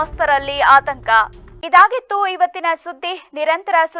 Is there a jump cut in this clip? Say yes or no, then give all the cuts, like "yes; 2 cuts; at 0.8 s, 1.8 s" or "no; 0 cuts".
no; 0 cuts